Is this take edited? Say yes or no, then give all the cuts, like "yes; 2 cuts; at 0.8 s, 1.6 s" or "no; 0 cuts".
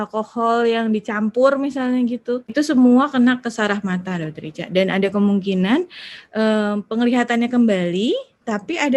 yes; 1 cut; at 2.5 s